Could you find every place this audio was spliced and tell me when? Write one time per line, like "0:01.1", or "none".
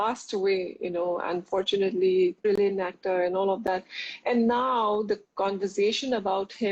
0:02.4

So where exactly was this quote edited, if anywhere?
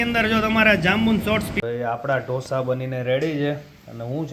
0:01.5

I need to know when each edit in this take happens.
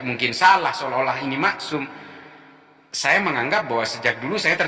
none

